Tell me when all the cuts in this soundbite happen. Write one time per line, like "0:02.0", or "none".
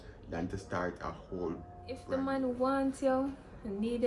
0:02.0

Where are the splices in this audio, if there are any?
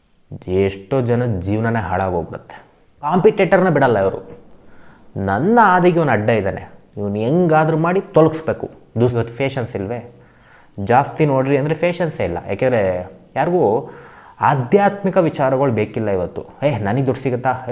0:03.1
0:09.1

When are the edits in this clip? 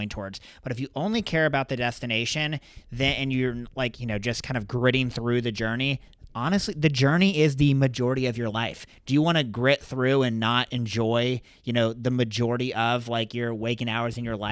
none

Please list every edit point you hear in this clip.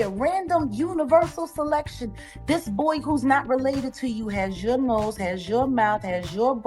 none

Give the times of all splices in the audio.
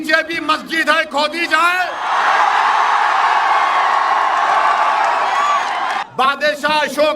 0:06.1

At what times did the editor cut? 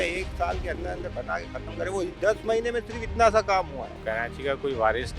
0:03.9

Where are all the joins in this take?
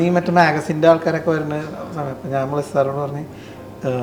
none

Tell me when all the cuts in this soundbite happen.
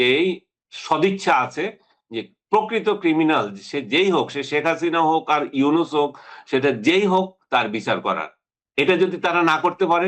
none

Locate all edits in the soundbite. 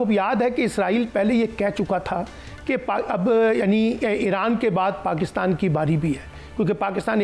none

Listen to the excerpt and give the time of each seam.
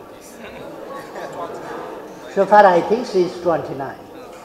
none

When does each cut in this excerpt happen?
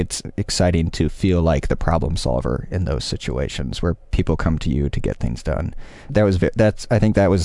0:06.0

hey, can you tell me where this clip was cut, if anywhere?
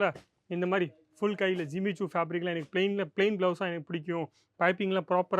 none

